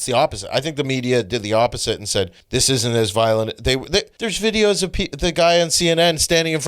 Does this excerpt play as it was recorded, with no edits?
no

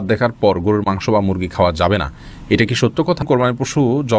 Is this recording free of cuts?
no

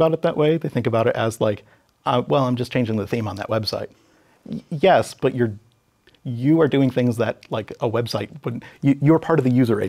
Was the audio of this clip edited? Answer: no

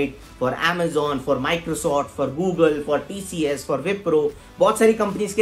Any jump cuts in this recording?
no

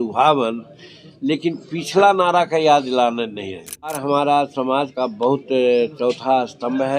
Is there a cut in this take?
yes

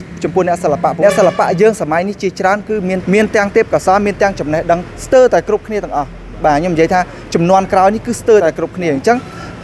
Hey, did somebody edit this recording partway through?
yes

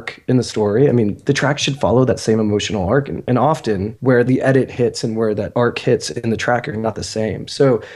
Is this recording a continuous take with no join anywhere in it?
no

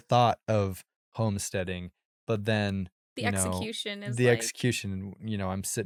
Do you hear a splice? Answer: no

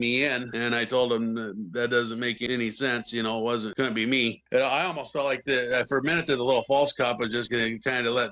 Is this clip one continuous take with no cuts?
yes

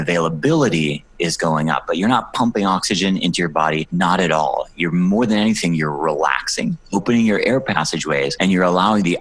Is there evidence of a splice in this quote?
no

